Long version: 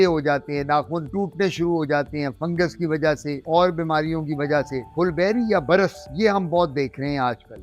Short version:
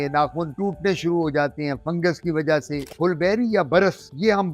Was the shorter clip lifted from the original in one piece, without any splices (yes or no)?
no